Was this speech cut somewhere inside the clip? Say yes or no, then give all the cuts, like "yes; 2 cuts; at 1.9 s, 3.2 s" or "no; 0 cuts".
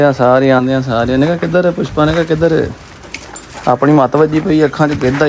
no; 0 cuts